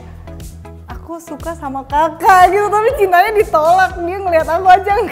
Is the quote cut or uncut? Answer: uncut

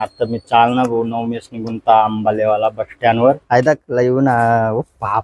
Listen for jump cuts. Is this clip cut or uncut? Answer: cut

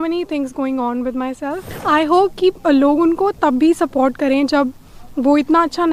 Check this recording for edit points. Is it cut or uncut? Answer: cut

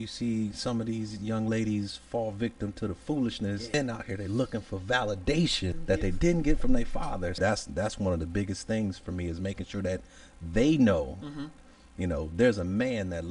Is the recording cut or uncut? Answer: cut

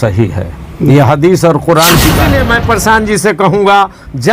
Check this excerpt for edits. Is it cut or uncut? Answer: cut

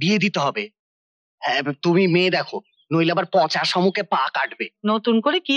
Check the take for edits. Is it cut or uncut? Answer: uncut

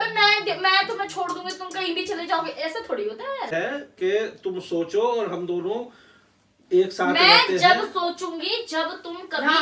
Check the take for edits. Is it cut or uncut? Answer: cut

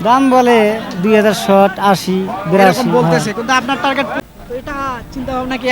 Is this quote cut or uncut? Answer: cut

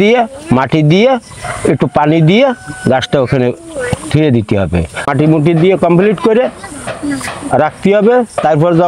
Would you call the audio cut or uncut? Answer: cut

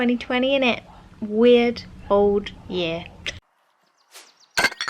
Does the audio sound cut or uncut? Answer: cut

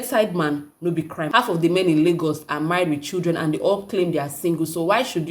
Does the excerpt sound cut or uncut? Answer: cut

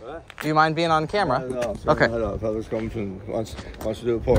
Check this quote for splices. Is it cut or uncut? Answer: uncut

